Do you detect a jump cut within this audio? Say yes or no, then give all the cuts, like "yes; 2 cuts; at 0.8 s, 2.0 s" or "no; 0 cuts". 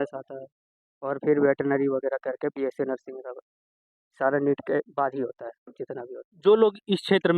yes; 1 cut; at 6.2 s